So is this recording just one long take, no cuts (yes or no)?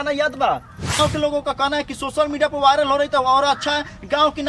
no